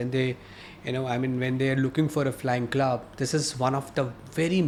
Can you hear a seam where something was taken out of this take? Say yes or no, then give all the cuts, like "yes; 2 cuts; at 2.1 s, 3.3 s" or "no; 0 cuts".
no; 0 cuts